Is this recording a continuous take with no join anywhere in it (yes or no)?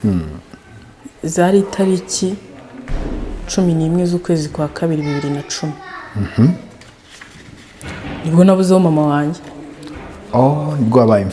yes